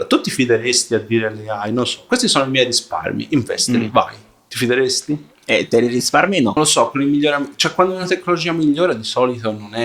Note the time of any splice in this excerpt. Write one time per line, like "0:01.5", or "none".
0:06.6